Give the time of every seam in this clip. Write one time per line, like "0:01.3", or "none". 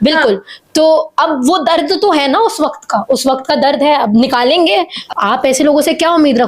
0:05.0